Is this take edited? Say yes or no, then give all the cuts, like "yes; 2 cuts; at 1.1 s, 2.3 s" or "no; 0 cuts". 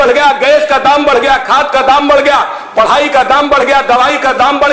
no; 0 cuts